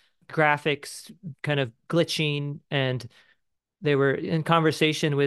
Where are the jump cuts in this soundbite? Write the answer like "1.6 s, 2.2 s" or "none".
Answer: none